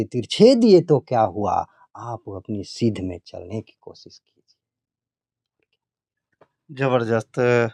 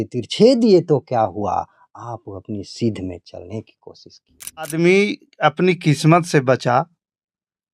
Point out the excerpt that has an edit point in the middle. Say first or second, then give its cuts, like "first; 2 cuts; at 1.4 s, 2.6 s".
second; 1 cut; at 4.7 s